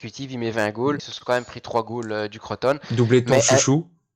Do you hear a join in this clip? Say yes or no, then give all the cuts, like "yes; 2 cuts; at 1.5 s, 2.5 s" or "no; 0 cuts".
yes; 1 cut; at 1.1 s